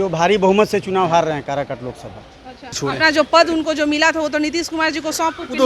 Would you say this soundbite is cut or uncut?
cut